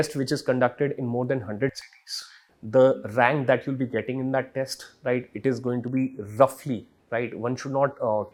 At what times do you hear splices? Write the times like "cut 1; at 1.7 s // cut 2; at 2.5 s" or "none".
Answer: none